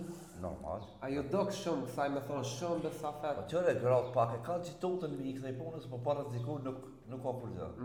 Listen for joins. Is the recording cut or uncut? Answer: uncut